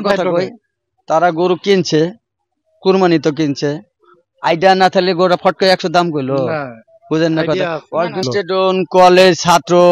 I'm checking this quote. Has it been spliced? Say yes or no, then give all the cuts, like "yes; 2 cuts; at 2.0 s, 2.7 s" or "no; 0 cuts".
yes; 1 cut; at 8.2 s